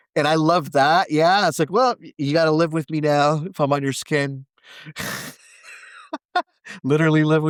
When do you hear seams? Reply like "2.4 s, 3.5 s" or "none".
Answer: none